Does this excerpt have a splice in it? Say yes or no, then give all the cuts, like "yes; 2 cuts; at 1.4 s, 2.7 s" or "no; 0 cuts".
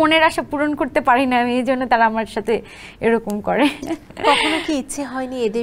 no; 0 cuts